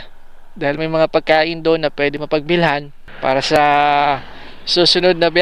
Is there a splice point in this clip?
yes; 1 cut; at 3.0 s

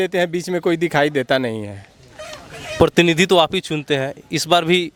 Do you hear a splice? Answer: no; 0 cuts

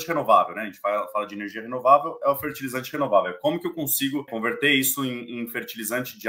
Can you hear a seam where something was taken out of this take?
yes; 1 cut; at 4.3 s

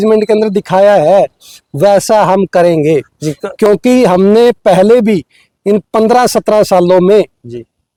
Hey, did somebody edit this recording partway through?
no; 0 cuts

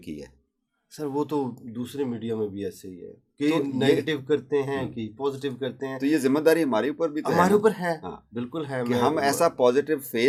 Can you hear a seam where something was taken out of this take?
no; 0 cuts

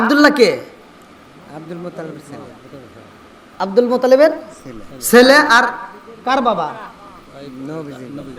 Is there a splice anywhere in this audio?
no; 0 cuts

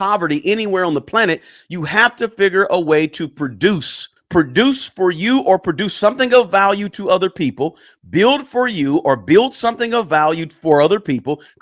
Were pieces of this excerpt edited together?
no; 0 cuts

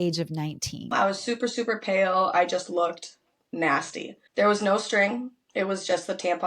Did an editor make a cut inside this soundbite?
yes; 2 cuts; at 0.9 s, 4.2 s

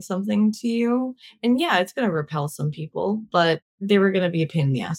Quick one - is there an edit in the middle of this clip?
yes; 1 cut; at 3.8 s

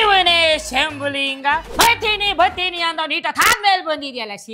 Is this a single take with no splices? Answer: no; 1 cut; at 1.7 s

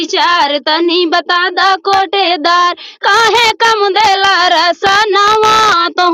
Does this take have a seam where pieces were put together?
no; 0 cuts

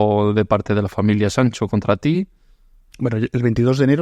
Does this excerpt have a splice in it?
no; 0 cuts

